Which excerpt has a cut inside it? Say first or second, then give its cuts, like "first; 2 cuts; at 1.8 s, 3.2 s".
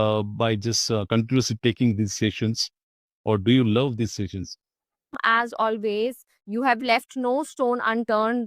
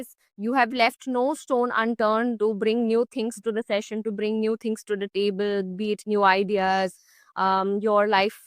first; 1 cut; at 5.2 s